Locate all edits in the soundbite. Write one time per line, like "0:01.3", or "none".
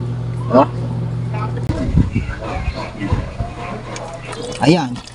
0:01.6